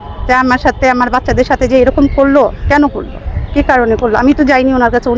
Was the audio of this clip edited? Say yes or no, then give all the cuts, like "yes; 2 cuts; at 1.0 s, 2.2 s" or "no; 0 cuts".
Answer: no; 0 cuts